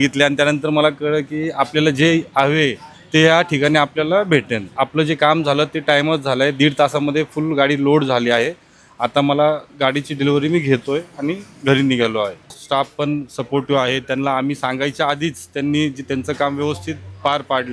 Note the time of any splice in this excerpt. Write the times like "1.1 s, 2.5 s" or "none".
4.7 s, 12.6 s